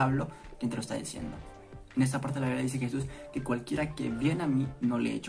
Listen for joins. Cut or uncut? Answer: uncut